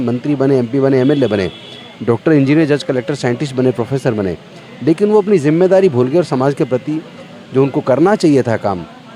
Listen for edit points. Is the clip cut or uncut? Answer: uncut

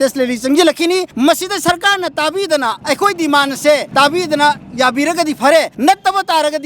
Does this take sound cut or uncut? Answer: cut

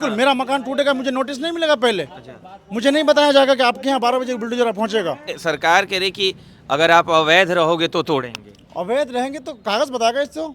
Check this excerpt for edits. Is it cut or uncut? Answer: cut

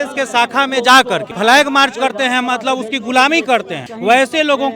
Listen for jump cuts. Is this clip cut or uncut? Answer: cut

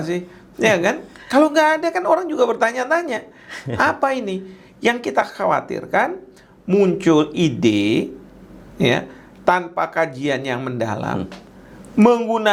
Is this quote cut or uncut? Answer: uncut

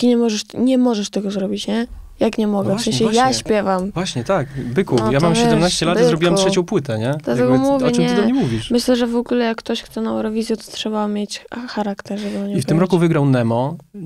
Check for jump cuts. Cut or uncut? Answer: uncut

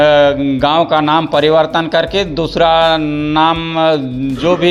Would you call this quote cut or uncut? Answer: uncut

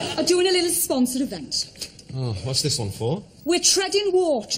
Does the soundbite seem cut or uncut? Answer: cut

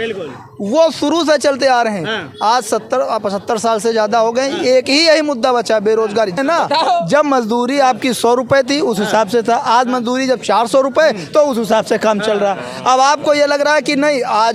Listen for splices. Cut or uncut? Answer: cut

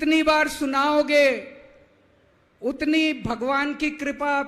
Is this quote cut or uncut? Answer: uncut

